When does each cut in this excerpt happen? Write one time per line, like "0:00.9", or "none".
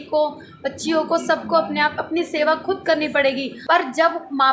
0:03.5

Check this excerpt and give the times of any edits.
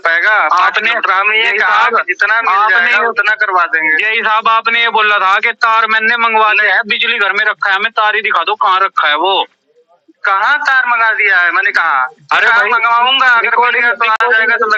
none

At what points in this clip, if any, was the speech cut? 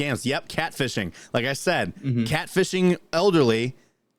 none

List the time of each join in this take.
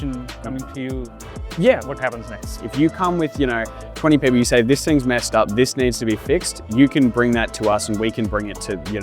0:02.4

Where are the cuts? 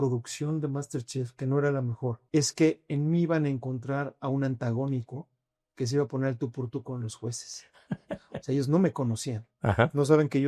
0:02.2

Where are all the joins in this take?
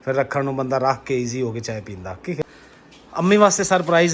0:02.6

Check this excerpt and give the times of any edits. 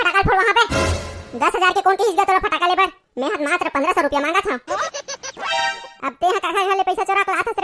0:05.3

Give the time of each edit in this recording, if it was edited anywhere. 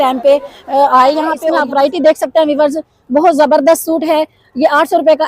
0:01.4

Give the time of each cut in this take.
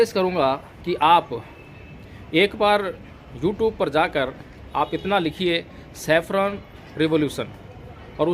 none

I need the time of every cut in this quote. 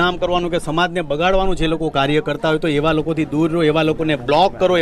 none

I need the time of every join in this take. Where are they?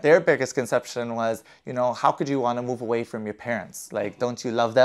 none

